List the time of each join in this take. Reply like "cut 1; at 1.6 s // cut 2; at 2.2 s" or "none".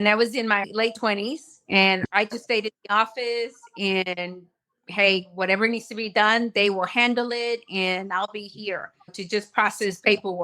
cut 1; at 9.0 s

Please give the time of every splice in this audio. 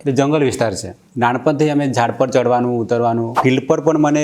cut 1; at 3.3 s

